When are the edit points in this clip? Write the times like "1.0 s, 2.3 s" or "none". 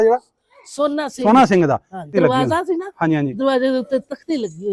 2.1 s